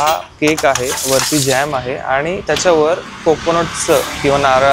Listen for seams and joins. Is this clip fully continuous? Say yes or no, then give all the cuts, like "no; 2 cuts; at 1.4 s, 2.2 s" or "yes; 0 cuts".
yes; 0 cuts